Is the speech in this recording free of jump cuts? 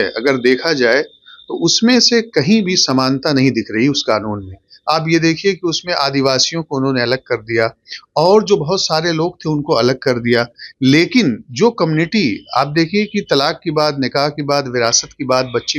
yes; 0 cuts

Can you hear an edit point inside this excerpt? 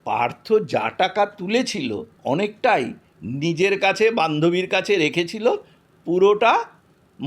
yes; 1 cut; at 2.1 s

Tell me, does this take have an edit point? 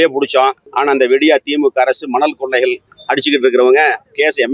no; 0 cuts

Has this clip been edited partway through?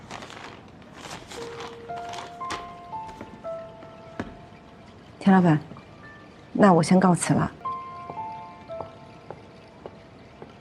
yes; 1 cut; at 7.6 s

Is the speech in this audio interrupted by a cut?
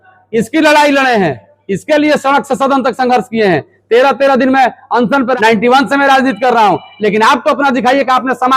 yes; 1 cut; at 5.4 s

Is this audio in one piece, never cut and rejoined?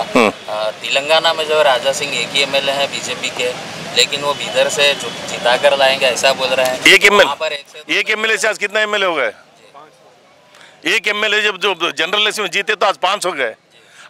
yes; 0 cuts

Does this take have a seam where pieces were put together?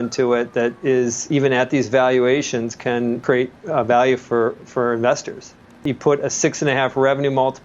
yes; 3 cuts; at 1.3 s, 3.2 s, 5.8 s

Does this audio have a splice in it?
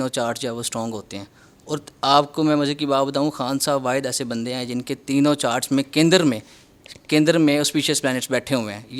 no; 0 cuts

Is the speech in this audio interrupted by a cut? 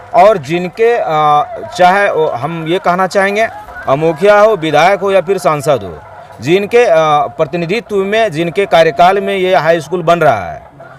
no; 0 cuts

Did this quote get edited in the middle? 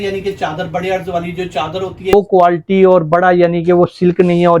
yes; 1 cut; at 2.1 s

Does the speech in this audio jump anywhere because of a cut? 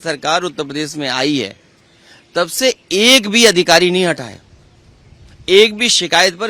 no; 0 cuts

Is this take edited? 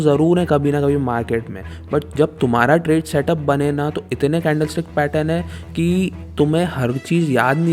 no; 0 cuts

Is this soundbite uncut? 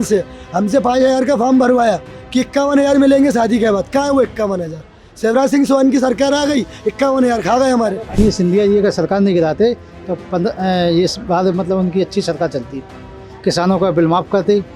no; 1 cut; at 8.2 s

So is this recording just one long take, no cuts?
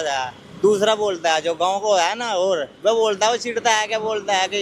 yes; 0 cuts

